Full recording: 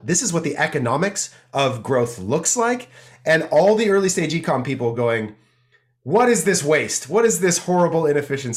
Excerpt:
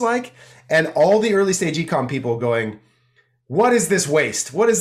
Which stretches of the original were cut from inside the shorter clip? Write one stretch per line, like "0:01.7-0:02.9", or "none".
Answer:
none